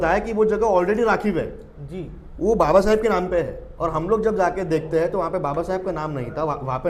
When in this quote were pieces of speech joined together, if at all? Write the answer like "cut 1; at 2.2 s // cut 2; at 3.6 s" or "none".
none